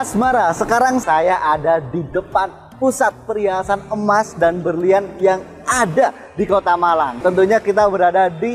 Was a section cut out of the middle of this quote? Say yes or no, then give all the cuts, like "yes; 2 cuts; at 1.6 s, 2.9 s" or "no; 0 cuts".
yes; 2 cuts; at 1.0 s, 7.2 s